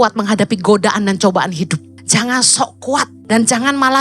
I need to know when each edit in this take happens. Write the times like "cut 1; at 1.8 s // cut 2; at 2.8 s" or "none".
cut 1; at 1.9 s // cut 2; at 3.2 s